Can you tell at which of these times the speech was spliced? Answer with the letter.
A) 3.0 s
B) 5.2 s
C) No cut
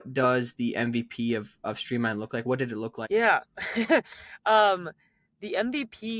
A